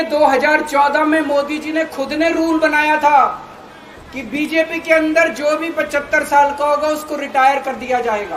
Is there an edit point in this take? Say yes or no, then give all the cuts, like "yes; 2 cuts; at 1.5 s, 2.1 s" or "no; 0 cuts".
no; 0 cuts